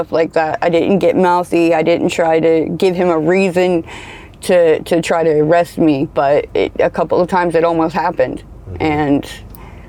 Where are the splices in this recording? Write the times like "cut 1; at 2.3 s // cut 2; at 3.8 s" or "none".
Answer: none